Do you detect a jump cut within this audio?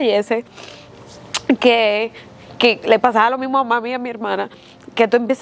no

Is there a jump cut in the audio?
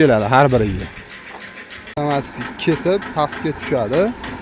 yes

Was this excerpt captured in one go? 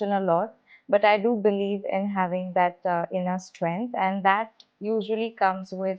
yes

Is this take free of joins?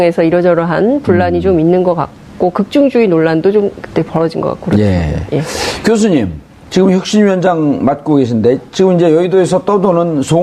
no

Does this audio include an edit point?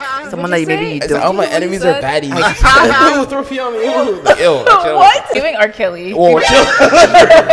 yes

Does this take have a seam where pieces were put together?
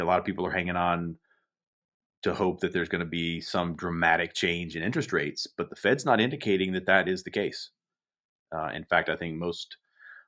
no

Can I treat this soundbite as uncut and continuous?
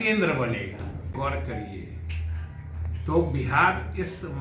no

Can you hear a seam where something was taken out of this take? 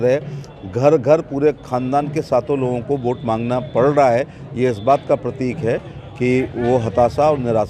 no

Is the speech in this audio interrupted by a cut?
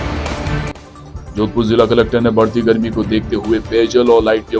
no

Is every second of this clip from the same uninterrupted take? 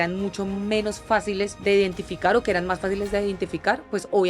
no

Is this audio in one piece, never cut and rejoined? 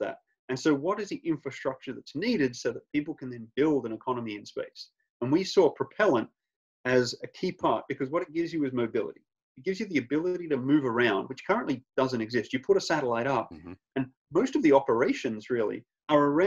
yes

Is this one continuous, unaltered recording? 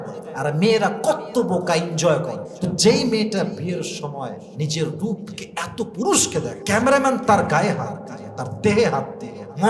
no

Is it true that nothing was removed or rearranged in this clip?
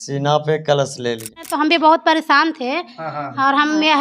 no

